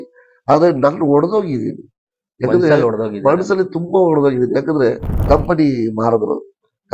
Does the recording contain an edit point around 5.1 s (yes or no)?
yes